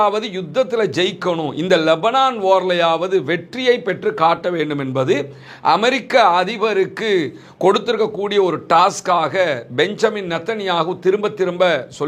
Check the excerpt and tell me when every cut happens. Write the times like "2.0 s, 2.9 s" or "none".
none